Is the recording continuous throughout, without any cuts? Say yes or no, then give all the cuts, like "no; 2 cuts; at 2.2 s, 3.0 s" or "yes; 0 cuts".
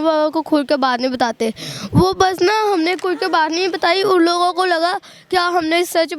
yes; 0 cuts